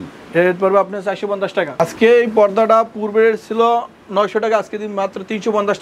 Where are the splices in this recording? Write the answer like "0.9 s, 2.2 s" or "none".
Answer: 1.7 s